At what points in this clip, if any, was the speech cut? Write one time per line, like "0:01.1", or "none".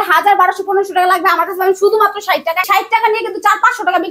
0:02.7